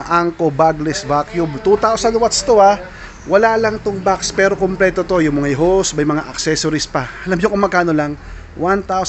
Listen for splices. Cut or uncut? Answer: uncut